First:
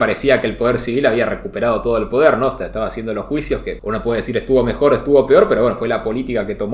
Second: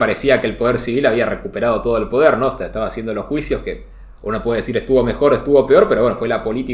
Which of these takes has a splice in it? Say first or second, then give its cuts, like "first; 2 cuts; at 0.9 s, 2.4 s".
first; 1 cut; at 3.8 s